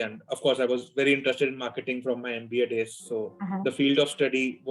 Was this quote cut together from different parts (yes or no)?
no